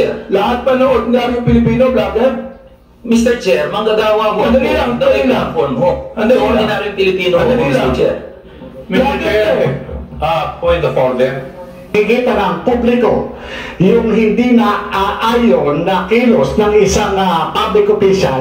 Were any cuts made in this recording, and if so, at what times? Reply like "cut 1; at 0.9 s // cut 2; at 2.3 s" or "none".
cut 1; at 11.9 s